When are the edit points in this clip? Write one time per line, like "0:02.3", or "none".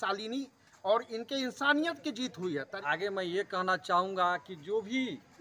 0:02.7